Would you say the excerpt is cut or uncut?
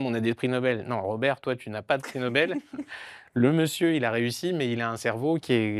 uncut